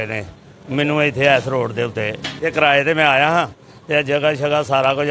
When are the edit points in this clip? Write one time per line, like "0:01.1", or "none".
0:02.3